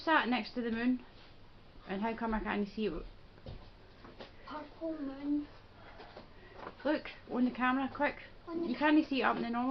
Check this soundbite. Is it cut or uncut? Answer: cut